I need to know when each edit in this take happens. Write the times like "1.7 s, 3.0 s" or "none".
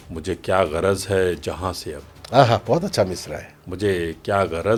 none